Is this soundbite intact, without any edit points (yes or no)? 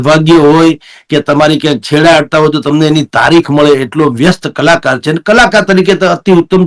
yes